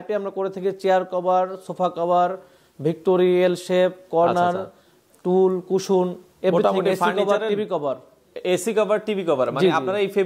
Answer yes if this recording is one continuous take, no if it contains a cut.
yes